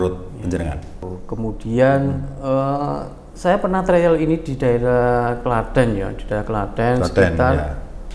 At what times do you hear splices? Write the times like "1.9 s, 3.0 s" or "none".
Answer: 1.0 s